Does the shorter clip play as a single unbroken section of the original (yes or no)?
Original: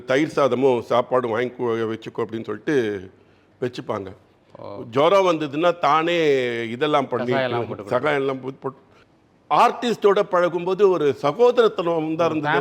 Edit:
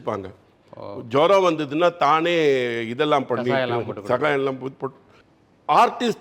yes